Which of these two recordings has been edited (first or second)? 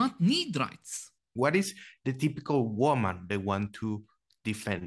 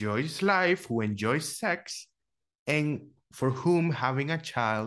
first